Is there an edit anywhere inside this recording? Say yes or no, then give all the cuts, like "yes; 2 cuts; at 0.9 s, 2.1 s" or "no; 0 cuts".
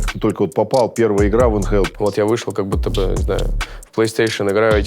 yes; 1 cut; at 1.9 s